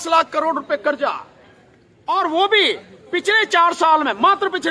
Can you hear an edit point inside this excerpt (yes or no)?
no